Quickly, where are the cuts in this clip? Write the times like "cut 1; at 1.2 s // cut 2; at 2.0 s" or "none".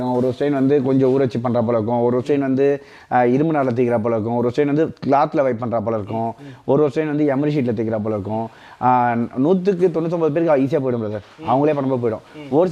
none